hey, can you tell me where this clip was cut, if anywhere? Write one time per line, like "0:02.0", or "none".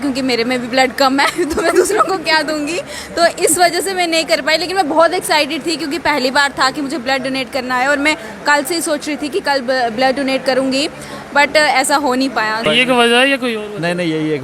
0:12.6